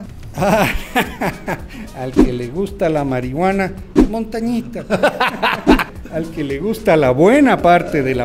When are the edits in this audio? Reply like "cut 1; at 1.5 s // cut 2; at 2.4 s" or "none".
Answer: none

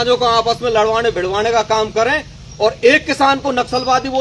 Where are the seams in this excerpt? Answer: none

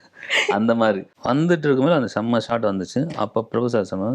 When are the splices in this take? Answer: cut 1; at 1.1 s

